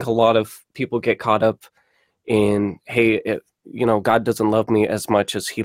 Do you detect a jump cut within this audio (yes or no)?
no